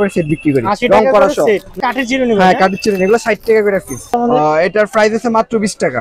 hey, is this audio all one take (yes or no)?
no